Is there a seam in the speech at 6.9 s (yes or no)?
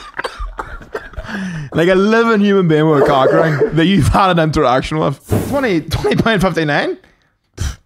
no